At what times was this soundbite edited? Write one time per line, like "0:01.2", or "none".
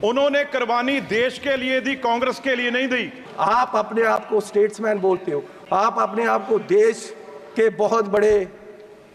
0:03.2